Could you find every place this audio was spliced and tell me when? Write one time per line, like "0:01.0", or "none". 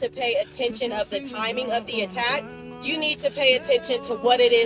none